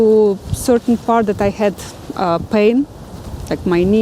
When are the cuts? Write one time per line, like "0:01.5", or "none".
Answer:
none